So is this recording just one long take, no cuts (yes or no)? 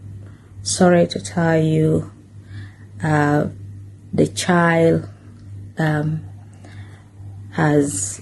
yes